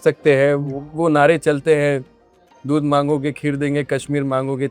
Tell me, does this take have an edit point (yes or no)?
no